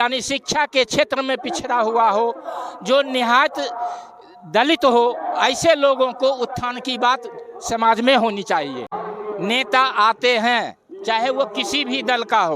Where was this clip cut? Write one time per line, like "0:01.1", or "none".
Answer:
0:09.0